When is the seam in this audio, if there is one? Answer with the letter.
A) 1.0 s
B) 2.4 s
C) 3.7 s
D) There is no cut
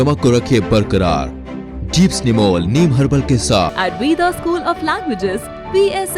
C